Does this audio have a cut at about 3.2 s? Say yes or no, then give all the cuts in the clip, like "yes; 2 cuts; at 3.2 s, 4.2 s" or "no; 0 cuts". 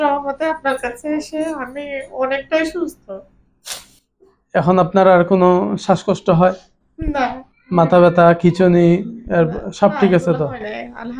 no; 0 cuts